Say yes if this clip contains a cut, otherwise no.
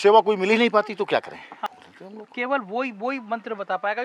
yes